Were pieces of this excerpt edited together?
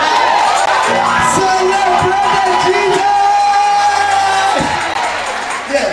no; 0 cuts

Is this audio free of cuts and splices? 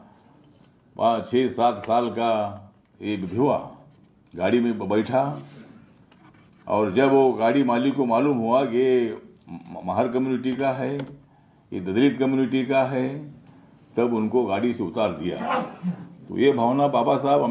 yes; 0 cuts

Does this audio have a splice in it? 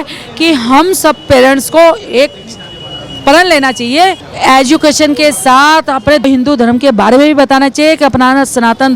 yes; 2 cuts; at 4.3 s, 6.2 s

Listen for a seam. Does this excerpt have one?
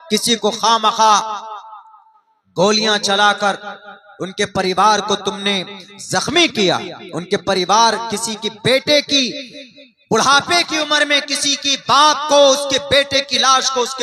no; 0 cuts

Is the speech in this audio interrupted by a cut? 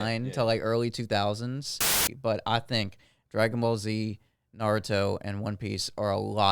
yes; 1 cut; at 2.1 s

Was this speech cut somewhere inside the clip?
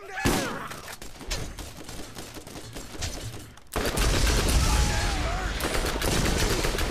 no; 0 cuts

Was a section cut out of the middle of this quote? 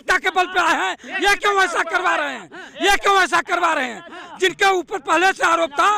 no; 0 cuts

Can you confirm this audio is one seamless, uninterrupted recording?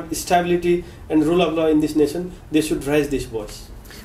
yes; 0 cuts

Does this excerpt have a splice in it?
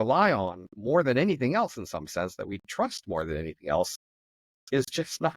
no; 0 cuts

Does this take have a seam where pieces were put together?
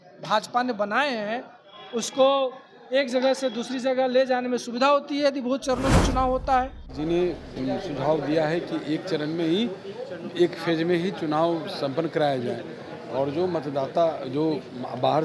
yes; 1 cut; at 6.8 s

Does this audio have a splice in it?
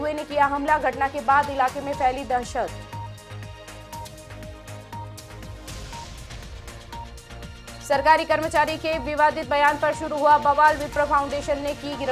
no; 0 cuts

